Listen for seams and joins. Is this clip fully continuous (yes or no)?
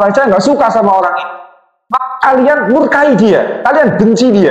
no